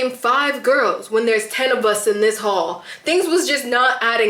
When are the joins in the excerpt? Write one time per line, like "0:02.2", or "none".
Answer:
none